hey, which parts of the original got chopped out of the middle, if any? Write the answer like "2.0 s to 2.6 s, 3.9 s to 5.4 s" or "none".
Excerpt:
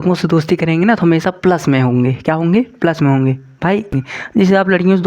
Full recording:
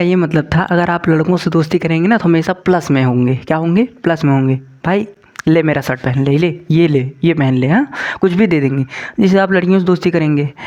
5.3 s to 8.9 s